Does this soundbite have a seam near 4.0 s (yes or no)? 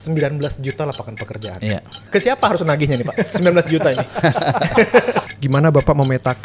no